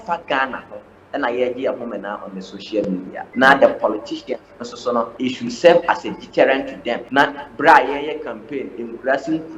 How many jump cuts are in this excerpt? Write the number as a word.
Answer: three